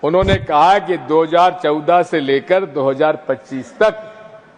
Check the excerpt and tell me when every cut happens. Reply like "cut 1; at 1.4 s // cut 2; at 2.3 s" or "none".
none